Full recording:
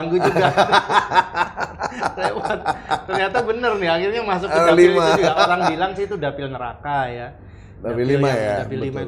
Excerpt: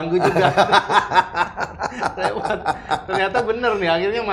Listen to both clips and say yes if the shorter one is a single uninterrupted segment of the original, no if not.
yes